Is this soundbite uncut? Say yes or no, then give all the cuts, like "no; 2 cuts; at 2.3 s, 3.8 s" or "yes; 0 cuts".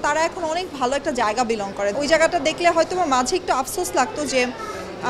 no; 1 cut; at 1.9 s